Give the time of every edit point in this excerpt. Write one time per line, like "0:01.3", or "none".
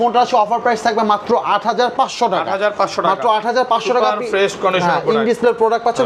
none